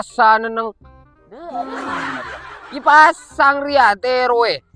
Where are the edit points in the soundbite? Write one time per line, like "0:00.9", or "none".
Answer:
none